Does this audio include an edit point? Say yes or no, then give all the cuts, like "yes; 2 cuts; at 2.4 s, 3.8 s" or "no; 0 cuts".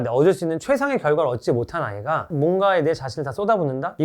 yes; 1 cut; at 2.3 s